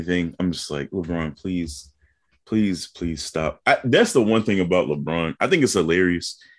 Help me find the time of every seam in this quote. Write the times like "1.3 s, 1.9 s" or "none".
none